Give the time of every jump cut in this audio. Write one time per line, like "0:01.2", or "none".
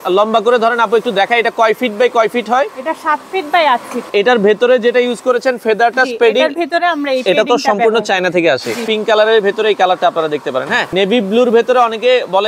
0:04.1
0:08.8
0:10.9